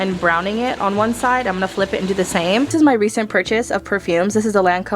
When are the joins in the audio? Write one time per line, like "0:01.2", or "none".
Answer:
0:02.7